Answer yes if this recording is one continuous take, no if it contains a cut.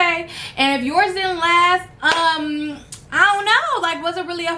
yes